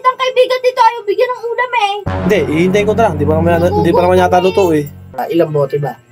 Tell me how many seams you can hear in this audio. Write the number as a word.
one